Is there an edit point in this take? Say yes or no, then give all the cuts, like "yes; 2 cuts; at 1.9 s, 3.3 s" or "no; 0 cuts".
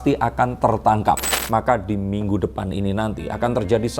yes; 1 cut; at 1.2 s